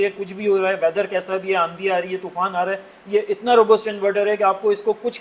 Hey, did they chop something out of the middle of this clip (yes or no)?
no